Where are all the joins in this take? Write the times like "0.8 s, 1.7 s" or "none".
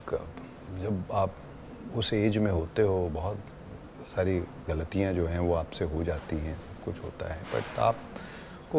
none